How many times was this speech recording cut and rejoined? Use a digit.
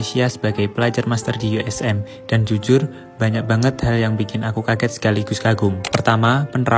0